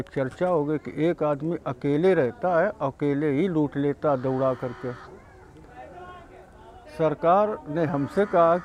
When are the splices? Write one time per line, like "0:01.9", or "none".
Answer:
none